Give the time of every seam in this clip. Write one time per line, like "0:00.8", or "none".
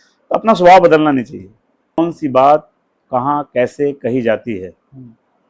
0:02.0